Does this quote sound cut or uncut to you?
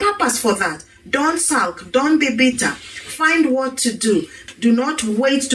cut